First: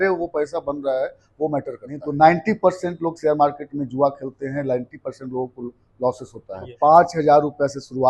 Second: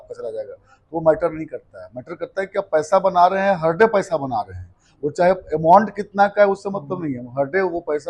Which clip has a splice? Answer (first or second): first